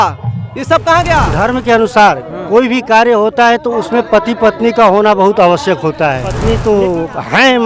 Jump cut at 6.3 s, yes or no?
yes